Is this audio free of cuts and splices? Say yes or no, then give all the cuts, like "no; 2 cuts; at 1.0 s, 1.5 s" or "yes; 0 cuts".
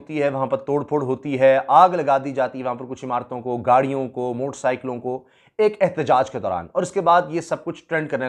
yes; 0 cuts